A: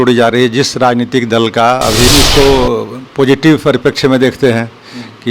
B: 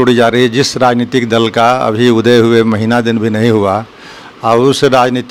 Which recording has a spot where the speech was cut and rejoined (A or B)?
A